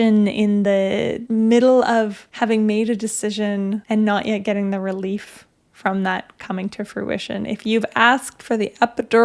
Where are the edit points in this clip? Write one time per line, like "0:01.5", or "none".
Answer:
0:01.2
0:02.2
0:03.8